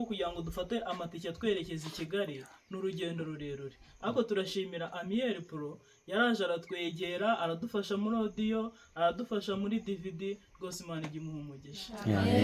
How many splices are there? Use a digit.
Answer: 0